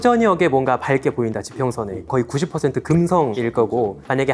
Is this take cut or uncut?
cut